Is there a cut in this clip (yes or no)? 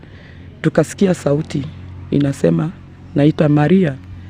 no